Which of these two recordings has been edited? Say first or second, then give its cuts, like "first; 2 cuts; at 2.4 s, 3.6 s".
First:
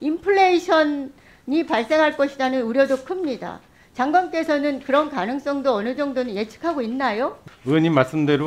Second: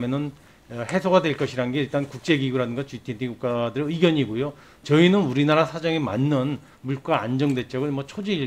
first; 1 cut; at 7.4 s